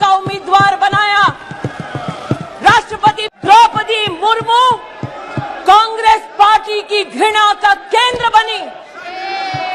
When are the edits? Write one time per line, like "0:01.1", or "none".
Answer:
0:03.2